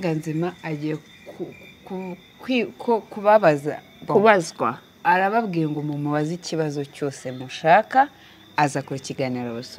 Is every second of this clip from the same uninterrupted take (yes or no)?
yes